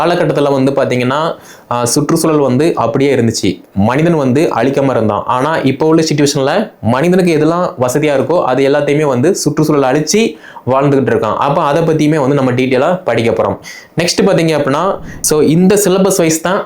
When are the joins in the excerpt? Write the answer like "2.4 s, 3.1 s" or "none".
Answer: 15.1 s

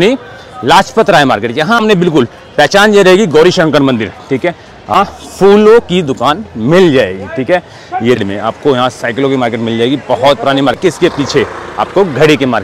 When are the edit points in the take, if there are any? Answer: 1.8 s, 4.9 s, 8.2 s, 10.8 s

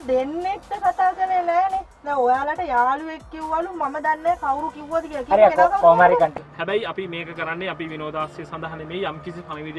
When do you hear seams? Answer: 6.3 s

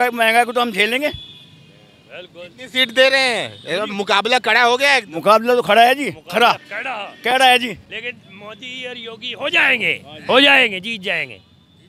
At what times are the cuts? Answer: none

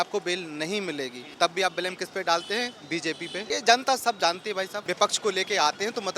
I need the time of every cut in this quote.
1.2 s, 3.4 s, 4.8 s

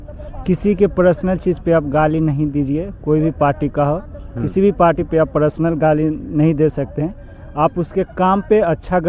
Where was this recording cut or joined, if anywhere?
none

